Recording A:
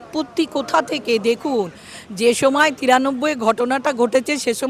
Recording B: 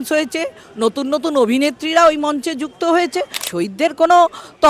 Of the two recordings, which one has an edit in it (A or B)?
B